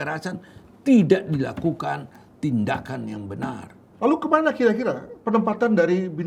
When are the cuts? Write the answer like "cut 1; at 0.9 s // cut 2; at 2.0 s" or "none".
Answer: cut 1; at 3.9 s